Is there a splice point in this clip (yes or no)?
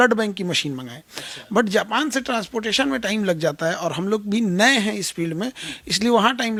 no